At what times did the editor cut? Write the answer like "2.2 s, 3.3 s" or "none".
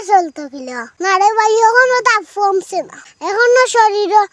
0.9 s